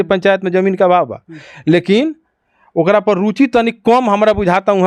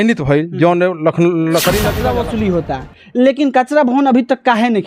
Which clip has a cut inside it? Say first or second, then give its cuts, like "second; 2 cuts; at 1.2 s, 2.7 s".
second; 1 cut; at 2.0 s